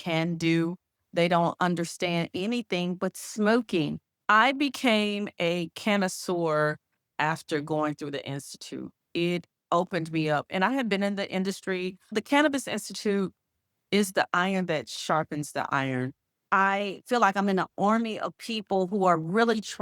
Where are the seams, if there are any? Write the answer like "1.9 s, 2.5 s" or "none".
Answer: 4.1 s, 12.2 s, 16.4 s